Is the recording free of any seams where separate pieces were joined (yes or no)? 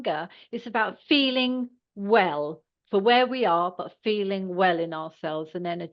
yes